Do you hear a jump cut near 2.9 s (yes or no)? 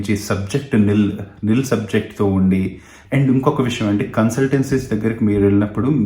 yes